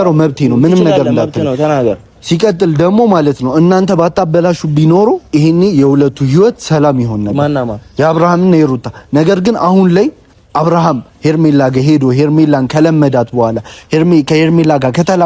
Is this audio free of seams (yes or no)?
yes